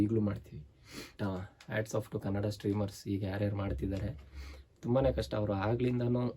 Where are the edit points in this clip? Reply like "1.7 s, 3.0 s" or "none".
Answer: 1.1 s